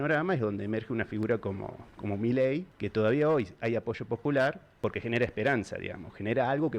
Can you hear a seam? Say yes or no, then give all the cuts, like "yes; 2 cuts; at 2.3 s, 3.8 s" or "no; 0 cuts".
yes; 2 cuts; at 2.8 s, 4.7 s